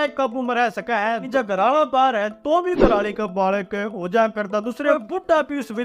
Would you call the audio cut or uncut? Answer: cut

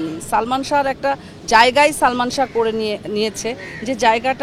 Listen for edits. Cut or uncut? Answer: uncut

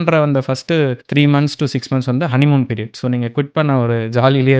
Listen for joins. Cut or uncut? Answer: cut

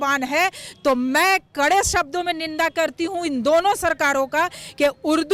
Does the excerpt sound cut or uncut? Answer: uncut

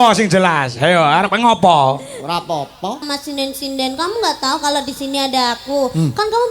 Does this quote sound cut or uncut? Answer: cut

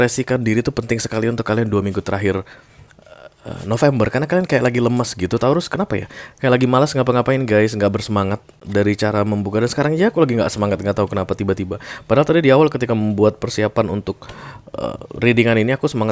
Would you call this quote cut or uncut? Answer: uncut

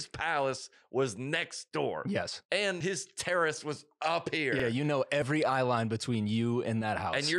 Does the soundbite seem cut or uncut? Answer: cut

